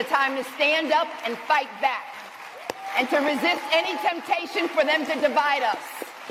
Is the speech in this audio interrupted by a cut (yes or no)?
no